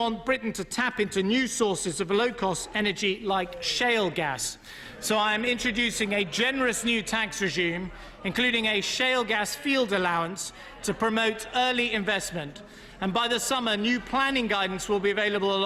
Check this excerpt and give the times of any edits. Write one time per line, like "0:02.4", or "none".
none